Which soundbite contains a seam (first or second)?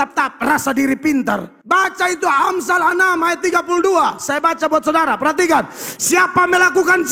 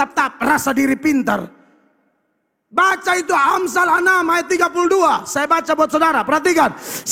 first